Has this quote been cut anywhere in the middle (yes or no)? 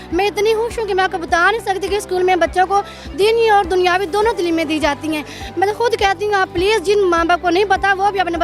no